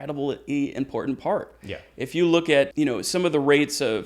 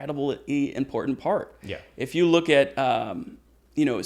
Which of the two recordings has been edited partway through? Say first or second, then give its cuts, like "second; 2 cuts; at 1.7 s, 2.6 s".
first; 1 cut; at 2.7 s